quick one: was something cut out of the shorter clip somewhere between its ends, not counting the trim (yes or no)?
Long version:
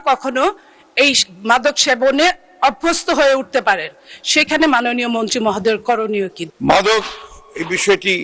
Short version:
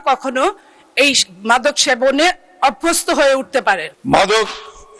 yes